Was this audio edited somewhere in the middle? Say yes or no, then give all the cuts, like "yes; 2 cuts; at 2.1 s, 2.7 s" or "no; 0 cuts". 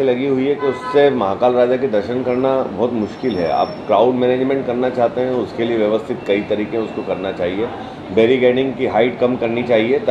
no; 0 cuts